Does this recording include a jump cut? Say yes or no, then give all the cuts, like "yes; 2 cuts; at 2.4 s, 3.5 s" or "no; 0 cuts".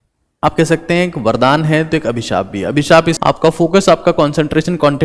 yes; 1 cut; at 3.1 s